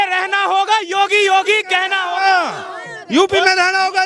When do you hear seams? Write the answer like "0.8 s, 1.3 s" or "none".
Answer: none

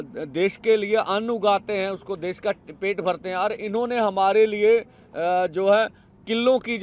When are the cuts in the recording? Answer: none

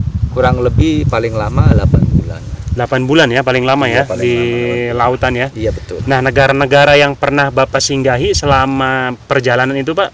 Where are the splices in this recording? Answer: none

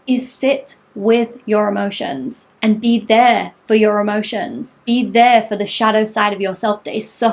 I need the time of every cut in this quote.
none

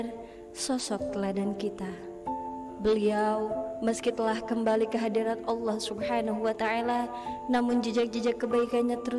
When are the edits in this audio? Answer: none

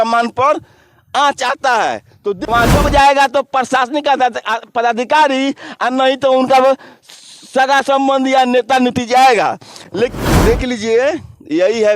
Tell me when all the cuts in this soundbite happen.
2.5 s, 10.1 s

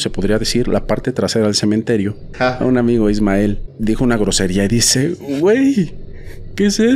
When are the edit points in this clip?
2.2 s, 3.7 s

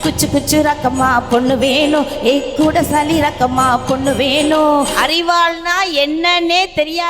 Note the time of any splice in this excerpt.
5.0 s

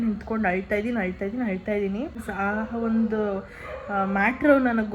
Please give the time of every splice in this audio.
2.2 s

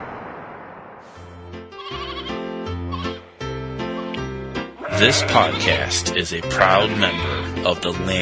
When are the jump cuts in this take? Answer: 1.3 s

